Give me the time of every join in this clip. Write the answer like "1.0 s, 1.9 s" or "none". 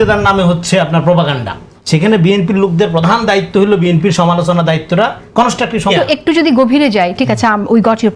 5.9 s